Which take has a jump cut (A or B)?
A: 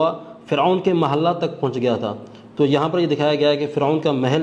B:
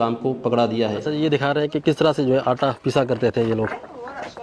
B